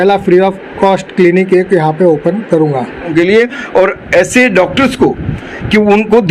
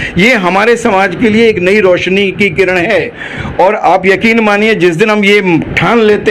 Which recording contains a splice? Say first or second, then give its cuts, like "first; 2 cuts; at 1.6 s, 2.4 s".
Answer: first; 1 cut; at 3.1 s